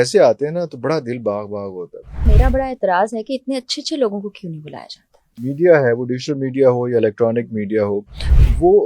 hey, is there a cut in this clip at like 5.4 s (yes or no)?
yes